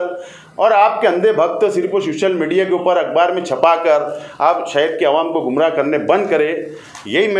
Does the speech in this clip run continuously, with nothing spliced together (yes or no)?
yes